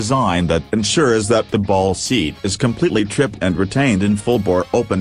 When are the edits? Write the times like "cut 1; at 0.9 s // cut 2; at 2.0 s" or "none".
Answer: none